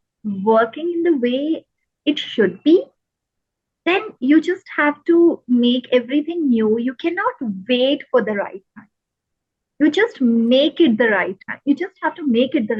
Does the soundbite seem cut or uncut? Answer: uncut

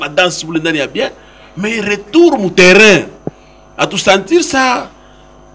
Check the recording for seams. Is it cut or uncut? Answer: uncut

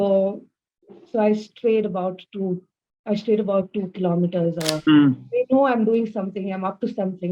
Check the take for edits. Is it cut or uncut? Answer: cut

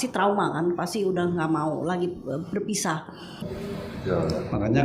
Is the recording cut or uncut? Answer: cut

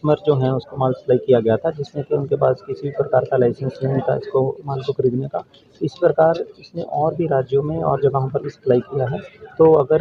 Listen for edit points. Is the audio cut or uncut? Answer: uncut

